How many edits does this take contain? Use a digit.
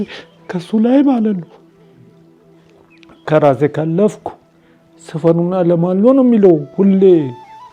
0